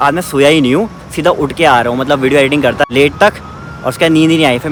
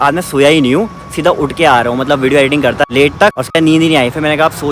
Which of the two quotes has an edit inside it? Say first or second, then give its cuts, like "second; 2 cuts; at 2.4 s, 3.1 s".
second; 1 cut; at 3.4 s